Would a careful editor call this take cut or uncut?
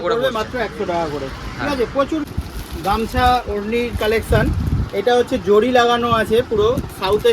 uncut